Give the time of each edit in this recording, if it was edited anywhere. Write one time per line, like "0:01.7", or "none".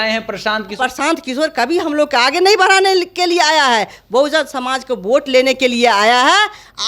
0:00.9